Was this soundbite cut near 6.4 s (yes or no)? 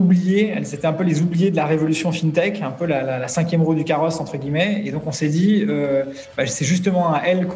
no